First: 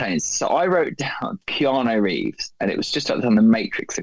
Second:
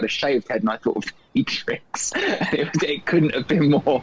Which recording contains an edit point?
first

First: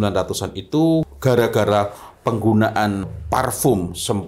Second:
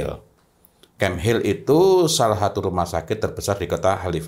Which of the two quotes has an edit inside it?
first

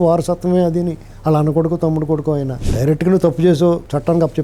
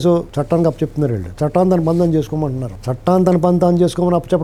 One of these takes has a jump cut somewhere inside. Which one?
first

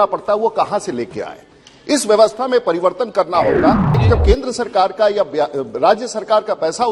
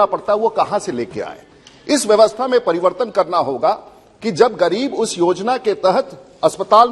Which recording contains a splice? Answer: first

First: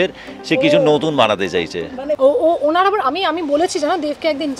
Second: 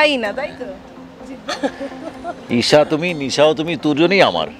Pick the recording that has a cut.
first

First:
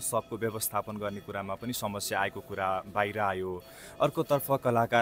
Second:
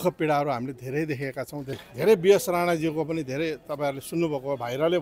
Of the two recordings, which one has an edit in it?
second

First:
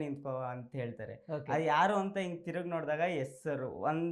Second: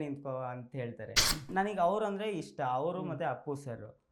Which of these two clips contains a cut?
second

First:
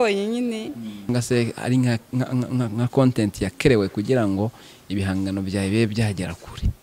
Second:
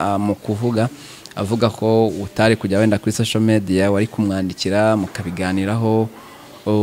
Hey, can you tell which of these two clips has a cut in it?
first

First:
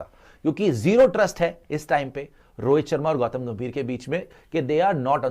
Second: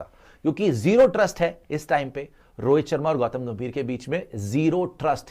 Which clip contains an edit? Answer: first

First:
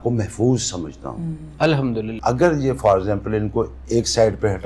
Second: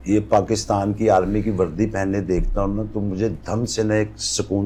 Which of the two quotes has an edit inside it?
first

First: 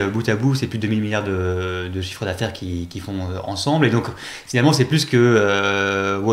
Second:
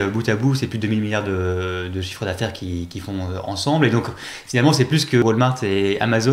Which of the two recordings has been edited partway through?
second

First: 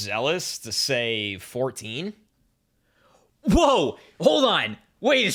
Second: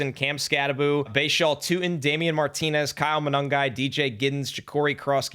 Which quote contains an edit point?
second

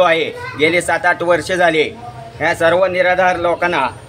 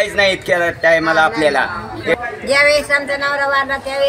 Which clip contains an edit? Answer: second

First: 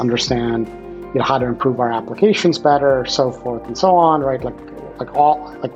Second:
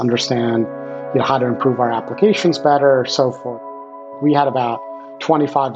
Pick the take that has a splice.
second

